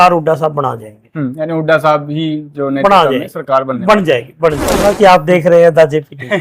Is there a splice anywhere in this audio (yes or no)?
yes